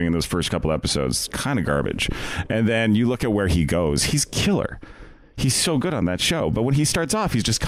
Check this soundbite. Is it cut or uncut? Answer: uncut